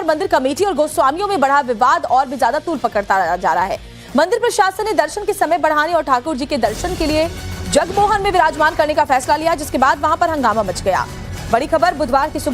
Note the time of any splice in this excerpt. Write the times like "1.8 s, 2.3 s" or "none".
10.3 s